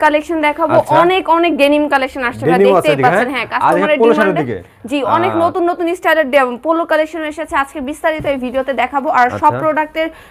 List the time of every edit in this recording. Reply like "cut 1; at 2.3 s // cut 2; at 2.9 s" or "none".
none